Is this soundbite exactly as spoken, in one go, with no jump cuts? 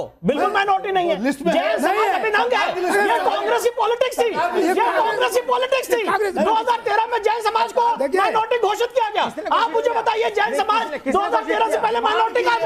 yes; 0 cuts

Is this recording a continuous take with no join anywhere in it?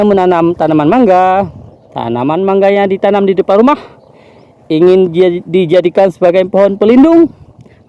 yes; 0 cuts

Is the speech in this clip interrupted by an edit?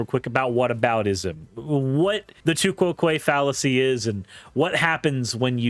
yes; 1 cut; at 2.3 s

